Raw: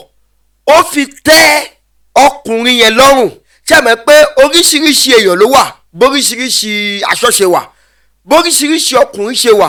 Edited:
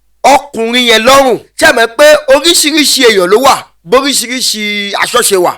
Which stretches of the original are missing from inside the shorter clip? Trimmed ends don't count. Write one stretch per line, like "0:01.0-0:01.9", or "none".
0:03.4-0:03.6